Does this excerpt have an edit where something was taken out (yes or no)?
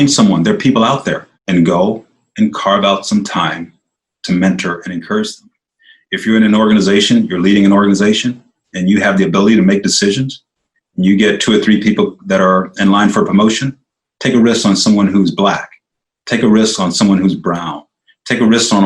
yes